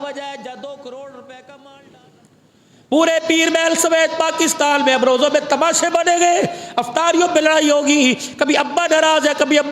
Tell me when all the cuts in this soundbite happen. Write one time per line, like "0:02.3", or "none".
0:01.7